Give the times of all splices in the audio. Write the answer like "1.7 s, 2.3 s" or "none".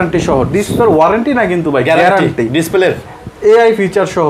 none